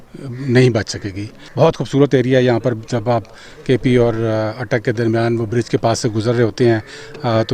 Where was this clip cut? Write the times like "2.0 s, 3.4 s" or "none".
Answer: 1.4 s